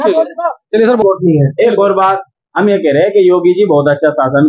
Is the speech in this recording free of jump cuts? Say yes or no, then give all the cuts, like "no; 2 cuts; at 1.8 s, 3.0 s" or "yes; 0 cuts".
no; 1 cut; at 1.0 s